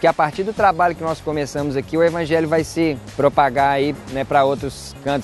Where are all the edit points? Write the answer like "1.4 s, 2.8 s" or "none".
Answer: 3.1 s, 4.0 s